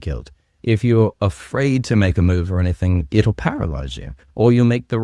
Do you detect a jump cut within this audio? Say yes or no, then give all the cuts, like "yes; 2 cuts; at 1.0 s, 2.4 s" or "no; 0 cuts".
no; 0 cuts